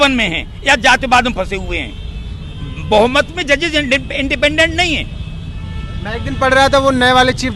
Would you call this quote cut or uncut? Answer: uncut